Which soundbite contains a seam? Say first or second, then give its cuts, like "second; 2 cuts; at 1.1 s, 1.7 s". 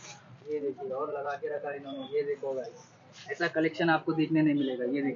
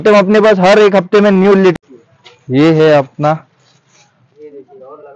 second; 1 cut; at 1.7 s